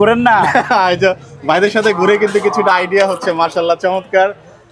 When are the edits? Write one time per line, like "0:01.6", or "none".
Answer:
none